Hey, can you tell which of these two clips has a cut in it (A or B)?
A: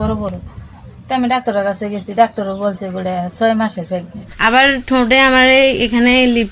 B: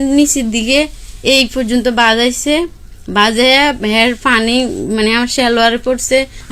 A